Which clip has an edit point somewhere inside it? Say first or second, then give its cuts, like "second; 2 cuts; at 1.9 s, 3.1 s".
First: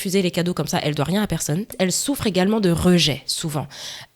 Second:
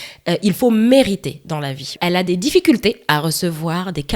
first; 1 cut; at 1.7 s